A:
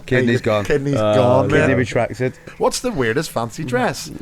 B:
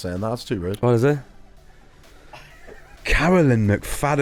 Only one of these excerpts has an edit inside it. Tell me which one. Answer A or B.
A